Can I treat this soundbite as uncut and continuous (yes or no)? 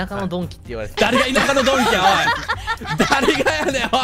yes